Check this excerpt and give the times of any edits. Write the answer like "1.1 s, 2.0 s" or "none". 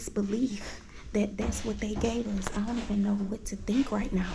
none